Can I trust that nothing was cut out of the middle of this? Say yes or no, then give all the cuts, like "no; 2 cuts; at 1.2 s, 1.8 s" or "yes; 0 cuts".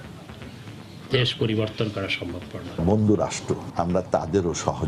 no; 2 cuts; at 2.8 s, 3.7 s